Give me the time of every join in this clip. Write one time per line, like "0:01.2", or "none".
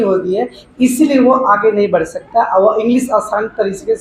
none